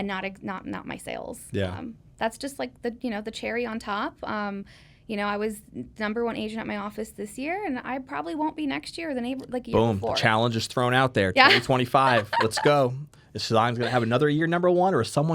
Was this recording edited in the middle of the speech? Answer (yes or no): no